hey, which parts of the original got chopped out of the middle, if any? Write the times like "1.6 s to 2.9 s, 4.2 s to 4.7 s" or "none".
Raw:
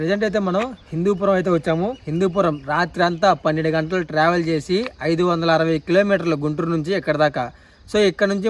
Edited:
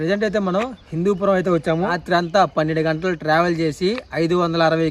2.0 s to 2.9 s